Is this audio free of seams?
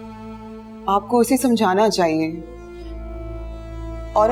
yes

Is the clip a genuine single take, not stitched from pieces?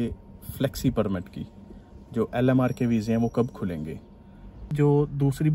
no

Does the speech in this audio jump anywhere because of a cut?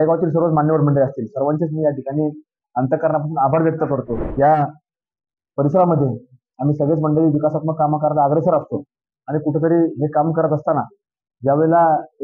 yes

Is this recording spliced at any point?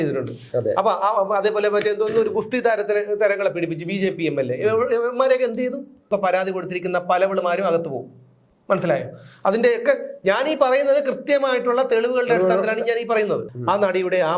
yes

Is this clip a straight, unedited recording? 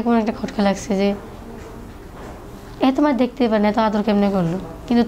yes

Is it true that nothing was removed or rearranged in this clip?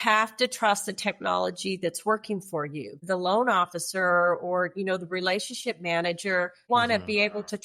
no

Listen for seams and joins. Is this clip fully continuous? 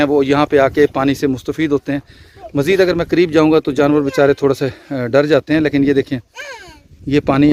yes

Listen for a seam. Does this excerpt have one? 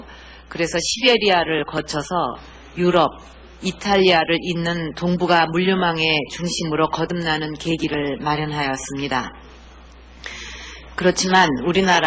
yes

